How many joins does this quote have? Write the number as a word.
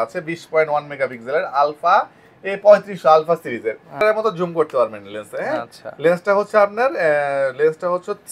one